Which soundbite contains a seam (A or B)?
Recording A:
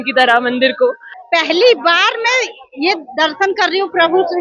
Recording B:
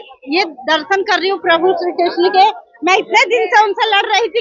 A